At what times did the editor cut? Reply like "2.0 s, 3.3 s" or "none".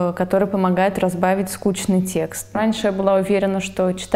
2.6 s

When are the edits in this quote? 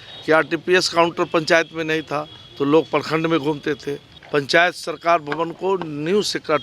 4.1 s

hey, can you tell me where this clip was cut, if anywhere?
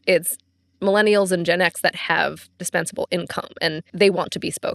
3.8 s

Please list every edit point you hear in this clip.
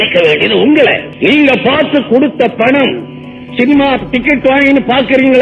1.1 s

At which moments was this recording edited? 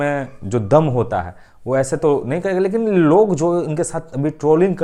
none

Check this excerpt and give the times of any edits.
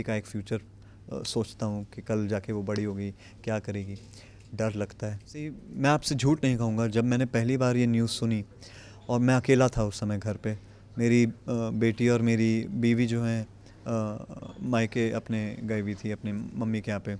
5.6 s

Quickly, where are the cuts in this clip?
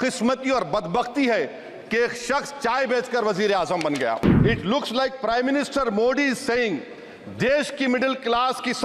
4.3 s

